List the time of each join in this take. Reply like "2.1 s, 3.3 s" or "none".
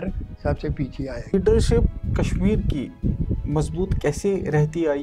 1.3 s

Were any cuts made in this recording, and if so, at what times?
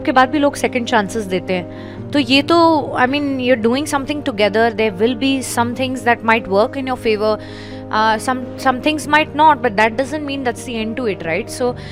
none

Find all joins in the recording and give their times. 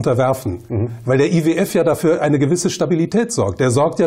1.7 s

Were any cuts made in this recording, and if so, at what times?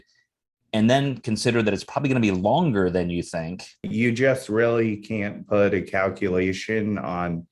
3.9 s

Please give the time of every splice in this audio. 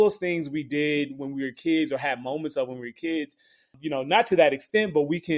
3.7 s

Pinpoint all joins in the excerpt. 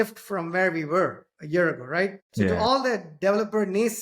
2.4 s

